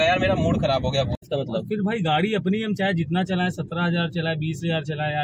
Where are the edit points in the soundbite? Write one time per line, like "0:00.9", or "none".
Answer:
0:01.2